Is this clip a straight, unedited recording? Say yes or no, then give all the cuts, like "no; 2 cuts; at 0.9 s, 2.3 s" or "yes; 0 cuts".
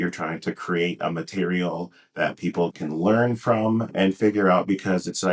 no; 2 cuts; at 2.7 s, 3.9 s